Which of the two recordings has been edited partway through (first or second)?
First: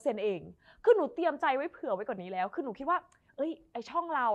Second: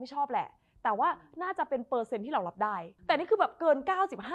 second